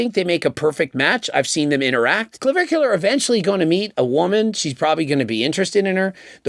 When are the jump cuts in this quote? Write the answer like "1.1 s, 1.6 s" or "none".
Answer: 2.3 s